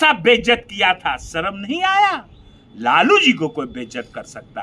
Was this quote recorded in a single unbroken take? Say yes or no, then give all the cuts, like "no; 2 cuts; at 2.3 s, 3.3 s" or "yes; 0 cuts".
yes; 0 cuts